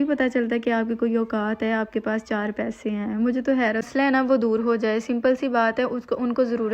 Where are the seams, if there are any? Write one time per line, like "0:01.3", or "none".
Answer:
0:03.8